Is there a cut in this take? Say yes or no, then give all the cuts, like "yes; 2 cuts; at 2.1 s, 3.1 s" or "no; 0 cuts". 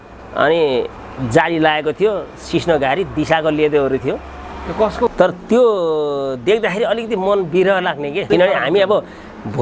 yes; 2 cuts; at 5.1 s, 8.3 s